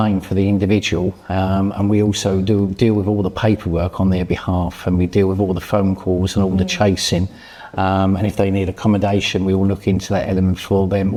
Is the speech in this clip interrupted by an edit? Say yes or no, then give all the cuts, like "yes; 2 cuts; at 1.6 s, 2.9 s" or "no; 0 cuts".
no; 0 cuts